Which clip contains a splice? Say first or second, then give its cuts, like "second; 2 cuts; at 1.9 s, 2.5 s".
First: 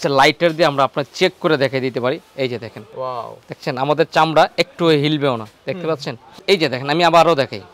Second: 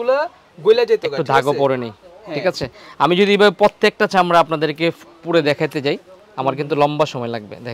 first; 2 cuts; at 2.8 s, 6.3 s